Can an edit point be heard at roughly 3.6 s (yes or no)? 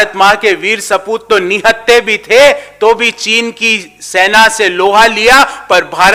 no